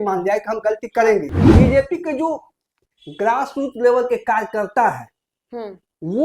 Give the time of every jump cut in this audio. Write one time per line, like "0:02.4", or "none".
0:01.4